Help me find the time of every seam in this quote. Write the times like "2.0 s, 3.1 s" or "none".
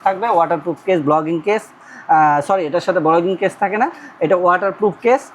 none